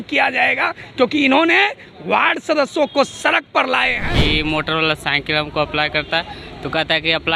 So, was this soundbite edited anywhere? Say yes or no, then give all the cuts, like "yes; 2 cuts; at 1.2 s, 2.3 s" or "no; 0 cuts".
yes; 1 cut; at 4.1 s